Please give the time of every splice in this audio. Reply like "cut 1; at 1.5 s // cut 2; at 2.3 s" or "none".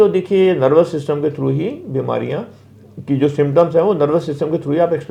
none